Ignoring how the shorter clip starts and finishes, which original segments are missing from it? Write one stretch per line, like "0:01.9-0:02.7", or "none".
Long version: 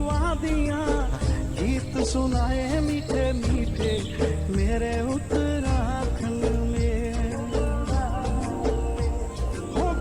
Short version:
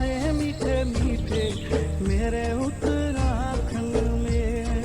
none

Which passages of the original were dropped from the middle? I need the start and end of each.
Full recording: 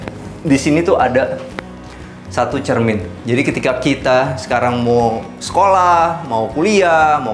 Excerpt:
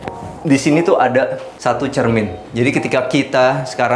0:01.5-0:02.2

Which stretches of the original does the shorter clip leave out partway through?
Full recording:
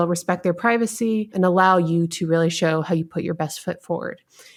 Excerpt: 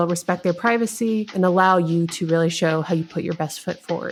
none

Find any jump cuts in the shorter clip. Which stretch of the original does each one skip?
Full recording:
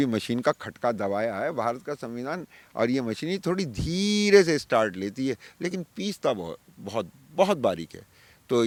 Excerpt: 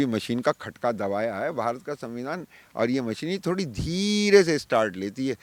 none

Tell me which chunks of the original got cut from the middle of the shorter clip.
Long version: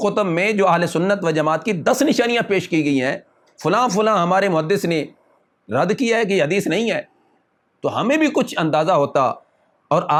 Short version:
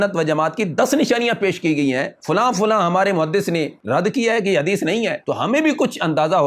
0:03.2-0:03.5
0:05.1-0:05.6
0:07.0-0:07.7

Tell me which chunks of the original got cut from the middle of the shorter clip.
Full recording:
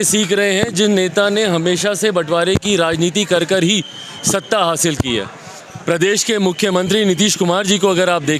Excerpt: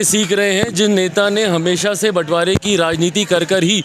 none

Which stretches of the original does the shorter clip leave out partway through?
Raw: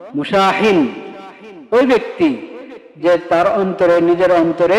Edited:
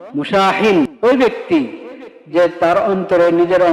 0:00.9-0:01.6

